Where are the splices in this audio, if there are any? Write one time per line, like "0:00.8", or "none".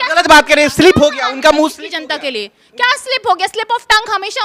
none